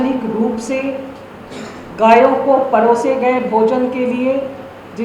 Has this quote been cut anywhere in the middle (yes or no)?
no